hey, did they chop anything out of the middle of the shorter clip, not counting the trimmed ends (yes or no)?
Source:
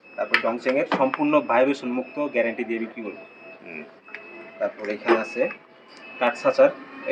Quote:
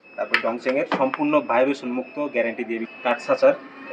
yes